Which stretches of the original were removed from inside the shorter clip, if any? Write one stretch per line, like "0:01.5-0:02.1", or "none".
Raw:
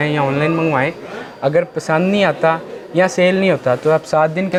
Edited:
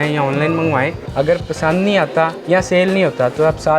0:01.0-0:01.3
0:02.6-0:02.8